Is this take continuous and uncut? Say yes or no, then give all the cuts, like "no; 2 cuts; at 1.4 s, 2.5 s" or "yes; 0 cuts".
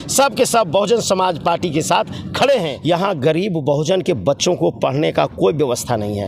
no; 1 cut; at 2.7 s